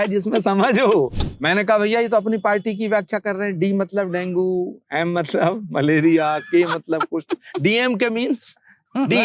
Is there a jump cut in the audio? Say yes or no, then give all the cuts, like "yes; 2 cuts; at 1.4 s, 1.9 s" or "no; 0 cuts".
yes; 1 cut; at 1.2 s